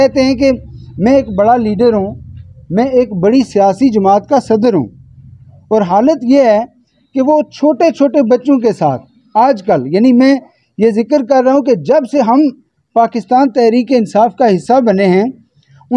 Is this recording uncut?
yes; 0 cuts

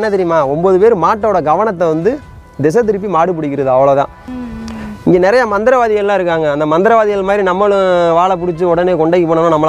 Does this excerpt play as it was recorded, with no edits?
no; 1 cut; at 4.2 s

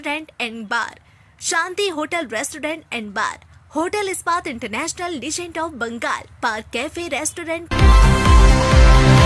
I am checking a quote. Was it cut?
yes; 1 cut; at 7.5 s

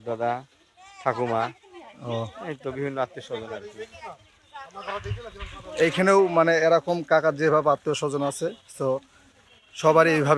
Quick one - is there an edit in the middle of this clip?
no; 0 cuts

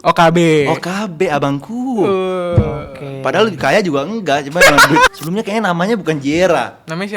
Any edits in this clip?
yes; 1 cut; at 5.1 s

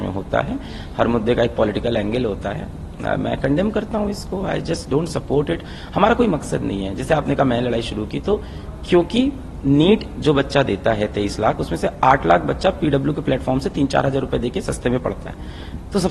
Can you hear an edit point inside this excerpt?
no; 0 cuts

